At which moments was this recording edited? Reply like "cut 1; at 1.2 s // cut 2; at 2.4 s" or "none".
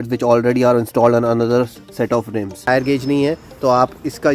cut 1; at 2.7 s